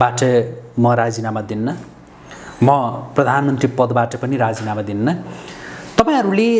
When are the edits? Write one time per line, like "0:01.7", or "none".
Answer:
none

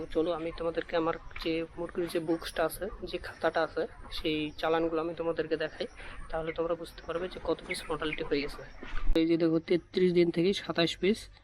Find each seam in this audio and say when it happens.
0:09.1

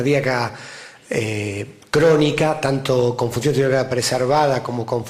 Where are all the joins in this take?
0:01.1

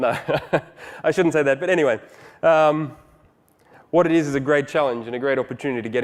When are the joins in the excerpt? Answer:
none

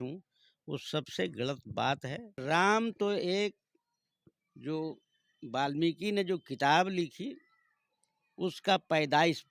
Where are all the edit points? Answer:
0:02.4

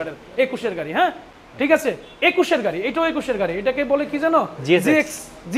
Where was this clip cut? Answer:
none

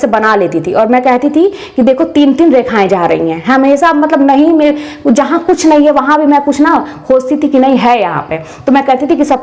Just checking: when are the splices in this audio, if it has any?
none

